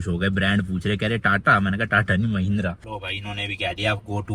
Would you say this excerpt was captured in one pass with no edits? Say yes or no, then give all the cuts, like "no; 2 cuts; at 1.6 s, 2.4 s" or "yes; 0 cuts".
no; 1 cut; at 2.9 s